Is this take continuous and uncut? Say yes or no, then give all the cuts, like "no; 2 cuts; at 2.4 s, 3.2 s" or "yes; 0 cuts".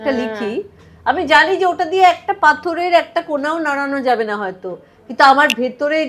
yes; 0 cuts